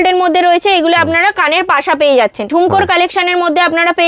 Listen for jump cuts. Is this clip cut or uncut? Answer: cut